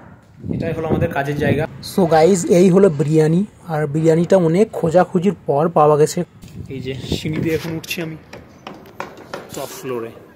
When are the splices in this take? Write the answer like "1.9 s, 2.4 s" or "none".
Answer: 1.6 s, 6.2 s